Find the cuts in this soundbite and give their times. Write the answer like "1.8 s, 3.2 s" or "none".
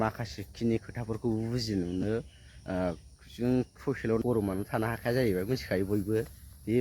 4.2 s